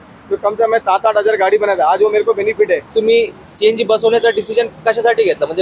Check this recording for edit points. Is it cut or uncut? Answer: cut